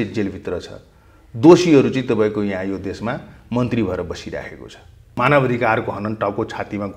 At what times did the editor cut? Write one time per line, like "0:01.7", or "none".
0:05.2